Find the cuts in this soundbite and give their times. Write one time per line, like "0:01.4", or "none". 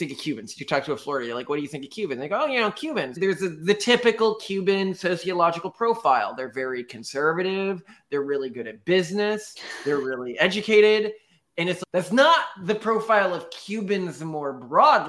0:03.2